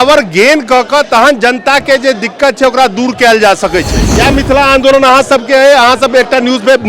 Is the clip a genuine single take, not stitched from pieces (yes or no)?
no